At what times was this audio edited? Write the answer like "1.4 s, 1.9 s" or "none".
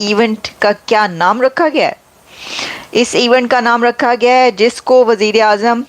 none